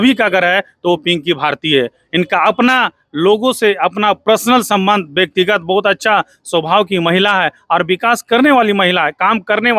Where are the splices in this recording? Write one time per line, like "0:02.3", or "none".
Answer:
none